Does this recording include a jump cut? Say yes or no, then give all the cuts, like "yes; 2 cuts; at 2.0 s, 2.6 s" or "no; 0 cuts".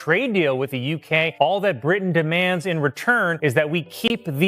yes; 2 cuts; at 1.0 s, 3.4 s